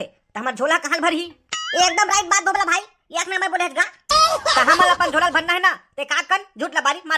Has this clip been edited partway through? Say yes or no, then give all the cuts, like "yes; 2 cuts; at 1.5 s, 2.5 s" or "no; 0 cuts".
no; 0 cuts